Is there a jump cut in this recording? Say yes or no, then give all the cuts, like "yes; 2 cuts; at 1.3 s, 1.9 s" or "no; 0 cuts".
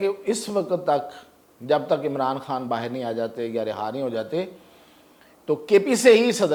no; 0 cuts